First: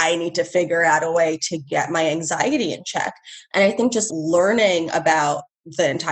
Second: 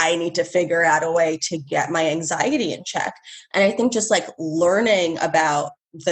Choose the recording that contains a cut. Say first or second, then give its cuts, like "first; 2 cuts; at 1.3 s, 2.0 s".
first; 1 cut; at 4.0 s